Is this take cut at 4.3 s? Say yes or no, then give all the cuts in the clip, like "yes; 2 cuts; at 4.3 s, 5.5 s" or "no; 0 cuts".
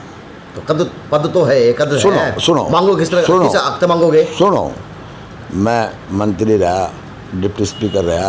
no; 0 cuts